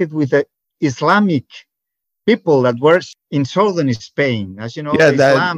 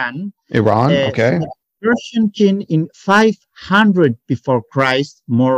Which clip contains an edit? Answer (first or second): first